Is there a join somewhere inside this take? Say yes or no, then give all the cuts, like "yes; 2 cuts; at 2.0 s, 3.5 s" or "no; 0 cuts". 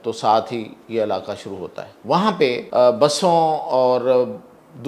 yes; 2 cuts; at 1.9 s, 2.6 s